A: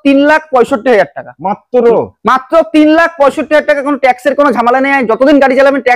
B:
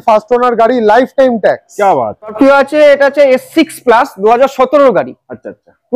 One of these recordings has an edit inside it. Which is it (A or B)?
B